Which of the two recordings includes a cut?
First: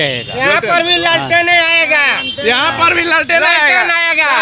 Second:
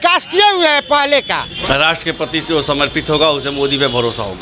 second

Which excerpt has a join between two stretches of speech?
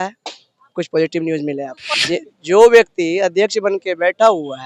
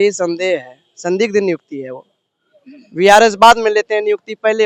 first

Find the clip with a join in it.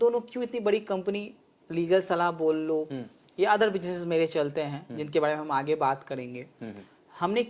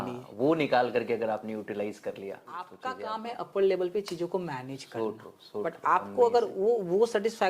second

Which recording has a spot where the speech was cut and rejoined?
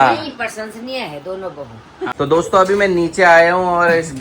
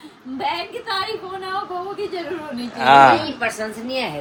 first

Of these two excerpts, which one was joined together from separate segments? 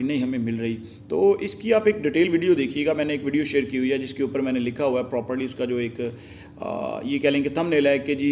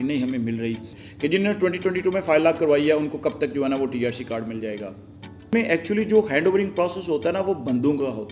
second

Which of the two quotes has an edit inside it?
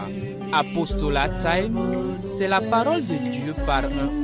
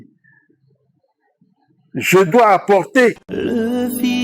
second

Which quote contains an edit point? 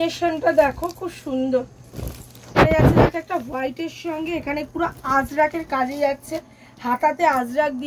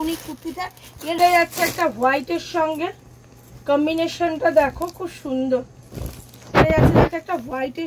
second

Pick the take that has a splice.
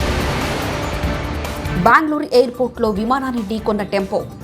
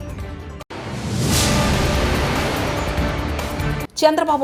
first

